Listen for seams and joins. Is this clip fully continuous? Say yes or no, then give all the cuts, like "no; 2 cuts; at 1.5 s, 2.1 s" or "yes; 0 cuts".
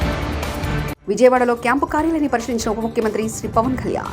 no; 1 cut; at 0.9 s